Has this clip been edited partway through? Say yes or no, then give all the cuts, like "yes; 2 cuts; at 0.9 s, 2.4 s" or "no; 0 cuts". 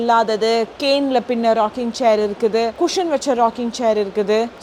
no; 0 cuts